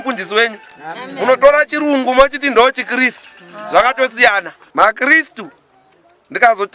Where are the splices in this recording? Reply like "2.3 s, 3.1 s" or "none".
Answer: 4.6 s